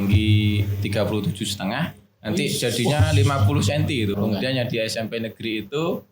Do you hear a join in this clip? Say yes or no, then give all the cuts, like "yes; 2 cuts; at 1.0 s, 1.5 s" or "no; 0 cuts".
yes; 1 cut; at 4.2 s